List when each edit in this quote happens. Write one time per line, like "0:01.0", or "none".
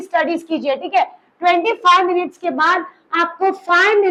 none